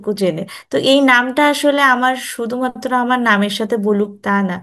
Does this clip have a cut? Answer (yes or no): no